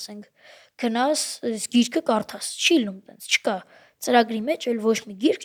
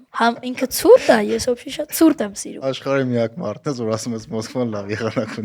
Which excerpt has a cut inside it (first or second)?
second